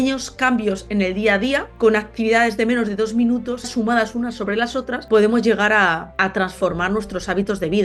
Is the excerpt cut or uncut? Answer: cut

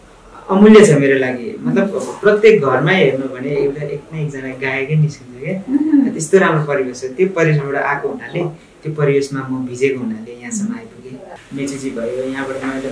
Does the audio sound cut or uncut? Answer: cut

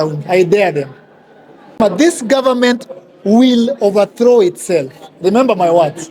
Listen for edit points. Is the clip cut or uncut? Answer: cut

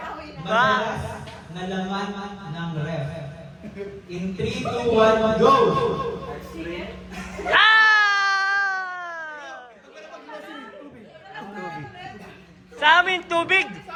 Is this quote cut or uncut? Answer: uncut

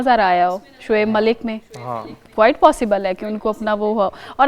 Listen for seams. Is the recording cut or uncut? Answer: uncut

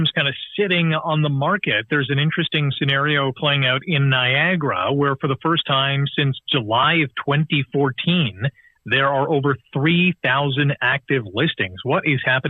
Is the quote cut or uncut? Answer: uncut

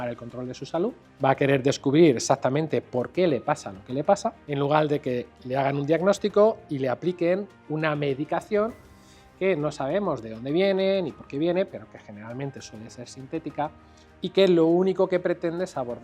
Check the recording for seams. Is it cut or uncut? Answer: cut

